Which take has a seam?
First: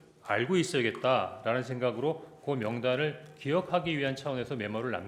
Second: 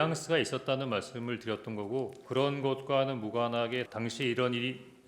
second; 2 cuts; at 2.2 s, 3.9 s

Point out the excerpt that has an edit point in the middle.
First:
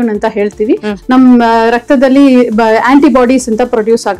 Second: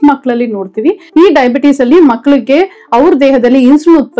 second; 1 cut; at 1.0 s

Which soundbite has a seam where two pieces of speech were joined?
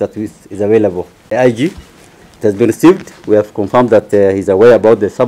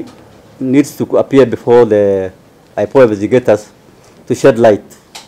first; 1 cut; at 1.1 s

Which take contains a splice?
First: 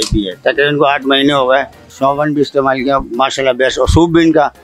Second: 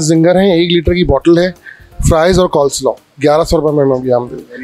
first; 1 cut; at 1.9 s

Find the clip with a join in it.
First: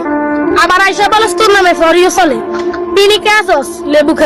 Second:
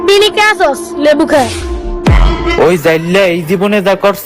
second; 1 cut; at 2.5 s

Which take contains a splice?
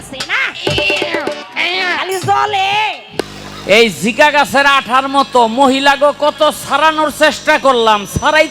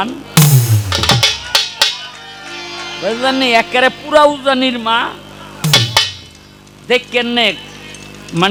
first; 1 cut; at 3.2 s

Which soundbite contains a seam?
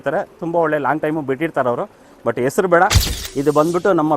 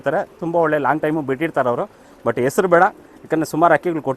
first; 1 cut; at 3.1 s

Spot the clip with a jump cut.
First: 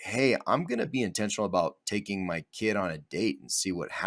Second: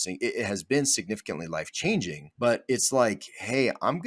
second; 1 cut; at 2.2 s

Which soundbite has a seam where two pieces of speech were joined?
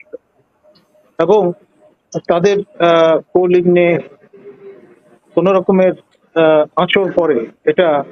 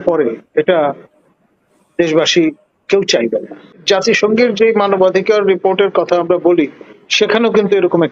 second; 1 cut; at 3.8 s

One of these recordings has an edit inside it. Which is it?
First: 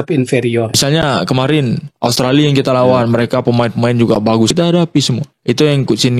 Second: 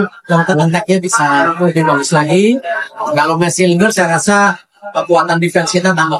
first; 2 cuts; at 0.8 s, 4.5 s

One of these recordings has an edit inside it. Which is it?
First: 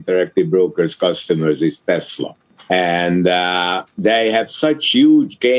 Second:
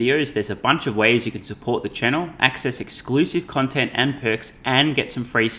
first; 2 cuts; at 2.5 s, 3.8 s

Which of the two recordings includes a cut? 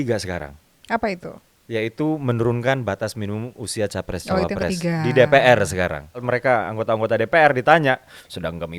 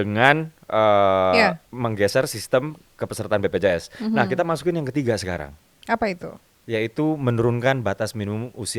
first; 1 cut; at 6.2 s

